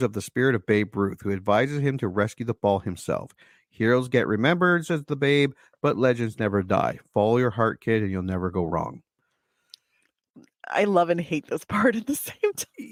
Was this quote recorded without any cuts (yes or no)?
yes